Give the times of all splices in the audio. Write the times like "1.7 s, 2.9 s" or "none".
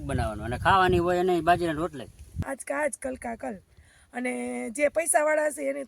2.3 s